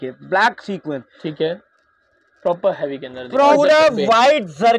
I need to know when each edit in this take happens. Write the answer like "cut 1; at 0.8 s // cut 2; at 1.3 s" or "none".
cut 1; at 3.5 s